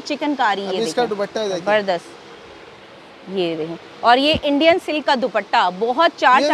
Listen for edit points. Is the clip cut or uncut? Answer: uncut